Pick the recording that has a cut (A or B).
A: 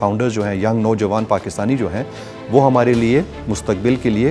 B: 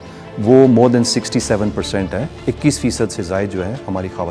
B